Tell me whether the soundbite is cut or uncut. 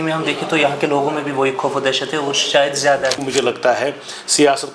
cut